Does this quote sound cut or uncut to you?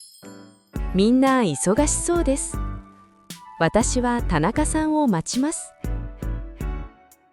cut